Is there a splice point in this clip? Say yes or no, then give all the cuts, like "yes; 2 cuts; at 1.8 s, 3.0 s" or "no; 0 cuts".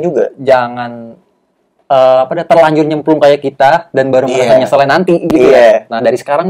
no; 0 cuts